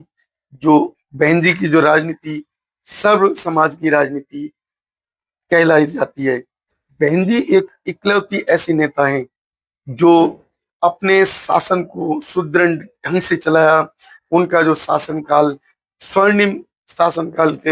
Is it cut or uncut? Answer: cut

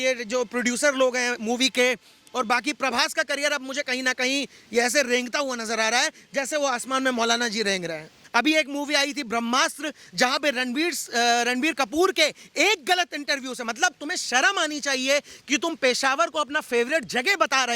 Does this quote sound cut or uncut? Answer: cut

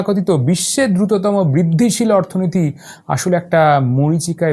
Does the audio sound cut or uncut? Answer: uncut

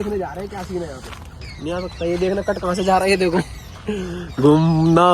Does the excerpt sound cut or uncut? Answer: cut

